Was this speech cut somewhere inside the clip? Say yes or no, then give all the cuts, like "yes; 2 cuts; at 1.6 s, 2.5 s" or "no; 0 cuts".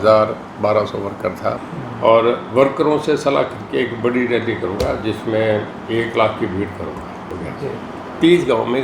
yes; 2 cuts; at 1.6 s, 7.3 s